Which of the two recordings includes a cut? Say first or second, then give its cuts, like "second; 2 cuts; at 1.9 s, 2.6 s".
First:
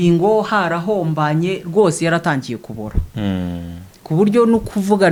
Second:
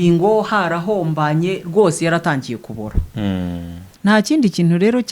second; 1 cut; at 3.9 s